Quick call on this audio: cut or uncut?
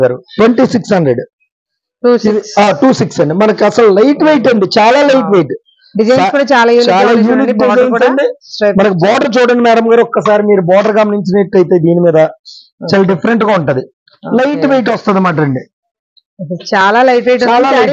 uncut